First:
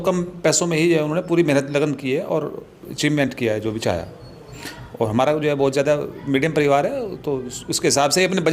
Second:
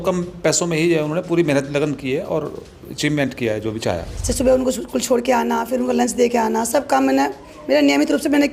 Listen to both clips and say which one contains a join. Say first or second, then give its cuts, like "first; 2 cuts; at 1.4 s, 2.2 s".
second; 1 cut; at 4.1 s